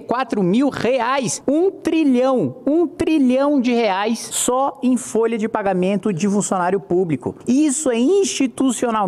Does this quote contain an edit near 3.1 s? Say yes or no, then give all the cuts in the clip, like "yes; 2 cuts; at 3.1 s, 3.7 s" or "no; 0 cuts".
no; 3 cuts; at 1.3 s, 4.3 s, 7.3 s